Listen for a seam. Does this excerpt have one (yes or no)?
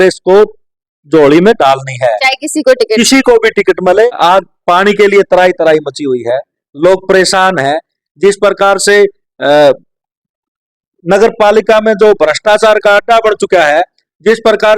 yes